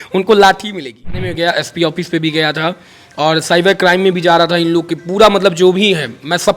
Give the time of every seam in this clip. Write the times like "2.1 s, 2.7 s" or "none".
1.2 s